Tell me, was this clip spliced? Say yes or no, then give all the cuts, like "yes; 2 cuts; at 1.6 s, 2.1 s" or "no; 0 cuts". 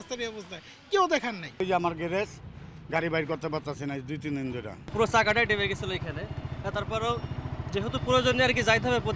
no; 0 cuts